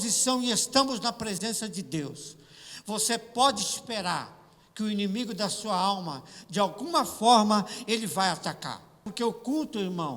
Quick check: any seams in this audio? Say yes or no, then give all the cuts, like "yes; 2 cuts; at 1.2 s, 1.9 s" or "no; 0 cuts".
yes; 1 cut; at 9.0 s